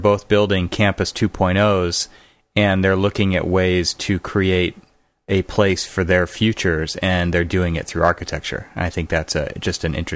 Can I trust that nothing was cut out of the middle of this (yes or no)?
yes